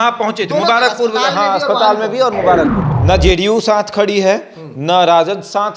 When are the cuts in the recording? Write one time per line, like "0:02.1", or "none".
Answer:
0:02.9